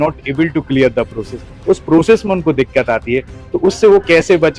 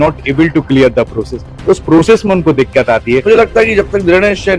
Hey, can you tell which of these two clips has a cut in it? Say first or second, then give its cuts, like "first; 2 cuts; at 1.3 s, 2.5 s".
second; 1 cut; at 3.2 s